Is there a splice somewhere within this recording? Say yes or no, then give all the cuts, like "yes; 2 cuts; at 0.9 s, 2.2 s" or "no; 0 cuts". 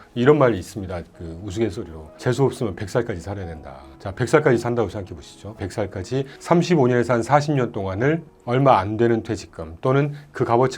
yes; 1 cut; at 5.6 s